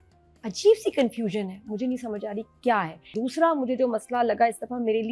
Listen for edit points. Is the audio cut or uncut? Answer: cut